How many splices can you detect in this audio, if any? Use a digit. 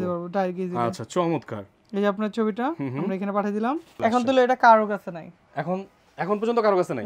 1